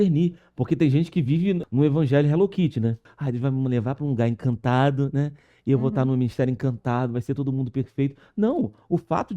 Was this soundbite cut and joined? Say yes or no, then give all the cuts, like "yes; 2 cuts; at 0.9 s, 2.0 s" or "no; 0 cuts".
yes; 2 cuts; at 1.6 s, 3.1 s